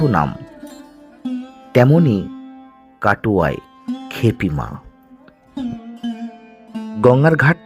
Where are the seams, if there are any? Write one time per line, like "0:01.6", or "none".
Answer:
none